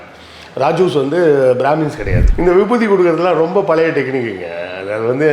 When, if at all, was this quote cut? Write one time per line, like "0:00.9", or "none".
0:02.2